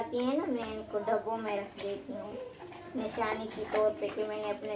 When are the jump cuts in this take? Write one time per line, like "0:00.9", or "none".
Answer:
none